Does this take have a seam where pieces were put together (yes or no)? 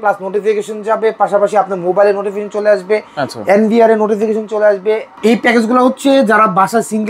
yes